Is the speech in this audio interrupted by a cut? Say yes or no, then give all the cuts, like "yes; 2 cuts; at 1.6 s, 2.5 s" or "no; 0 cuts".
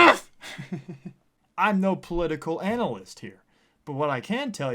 yes; 1 cut; at 1.4 s